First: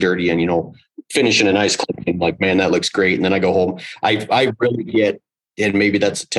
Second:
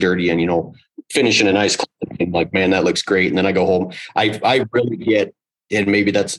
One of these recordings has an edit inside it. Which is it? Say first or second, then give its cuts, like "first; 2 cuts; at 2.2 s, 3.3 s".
first; 1 cut; at 1.9 s